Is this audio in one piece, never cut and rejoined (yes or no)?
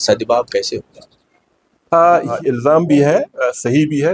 no